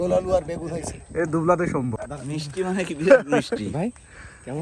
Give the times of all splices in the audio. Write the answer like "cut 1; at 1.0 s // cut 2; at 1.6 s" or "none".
cut 1; at 2.0 s